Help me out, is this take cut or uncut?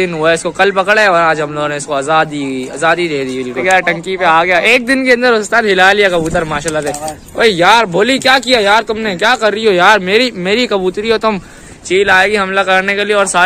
cut